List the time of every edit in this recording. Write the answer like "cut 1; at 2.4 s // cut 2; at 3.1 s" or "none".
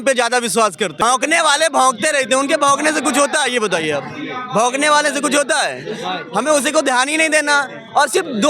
cut 1; at 1.0 s